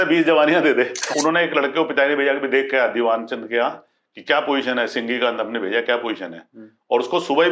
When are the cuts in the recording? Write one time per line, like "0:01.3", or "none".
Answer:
0:01.0